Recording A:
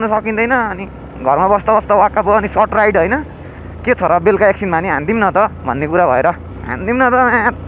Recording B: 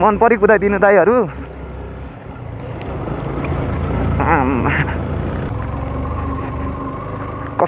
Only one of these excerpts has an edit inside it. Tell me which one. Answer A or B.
B